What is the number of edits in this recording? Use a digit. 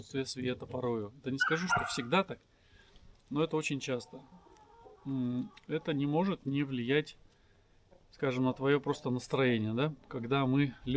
0